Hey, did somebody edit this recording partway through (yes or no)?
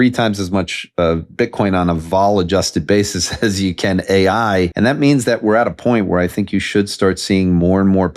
yes